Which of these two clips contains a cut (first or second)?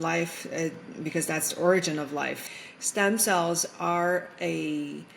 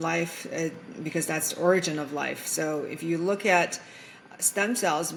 first